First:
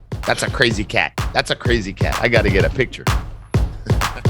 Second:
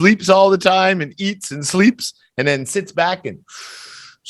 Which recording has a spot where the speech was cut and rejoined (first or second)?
first